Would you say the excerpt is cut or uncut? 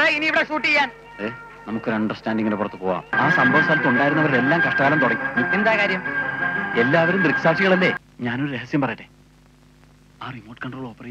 cut